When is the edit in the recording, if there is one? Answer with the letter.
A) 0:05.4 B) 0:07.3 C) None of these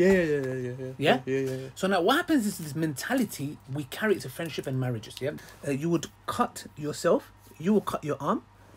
A